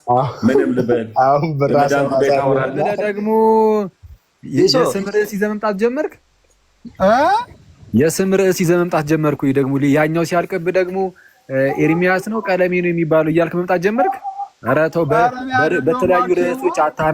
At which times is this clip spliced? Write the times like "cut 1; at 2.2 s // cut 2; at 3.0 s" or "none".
cut 1; at 3.0 s